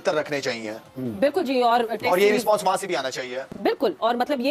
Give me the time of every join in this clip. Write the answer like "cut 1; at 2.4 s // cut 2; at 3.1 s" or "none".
none